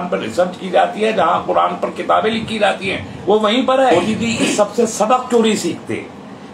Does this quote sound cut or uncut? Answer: cut